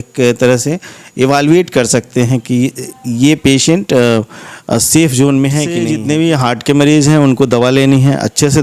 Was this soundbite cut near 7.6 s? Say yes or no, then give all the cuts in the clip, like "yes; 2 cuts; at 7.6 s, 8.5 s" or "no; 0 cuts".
no; 1 cut; at 5.9 s